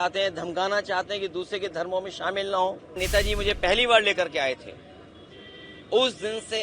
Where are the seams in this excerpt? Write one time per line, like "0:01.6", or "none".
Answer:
0:03.0